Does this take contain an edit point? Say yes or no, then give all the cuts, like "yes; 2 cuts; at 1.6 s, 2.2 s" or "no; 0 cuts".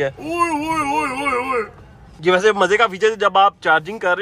no; 0 cuts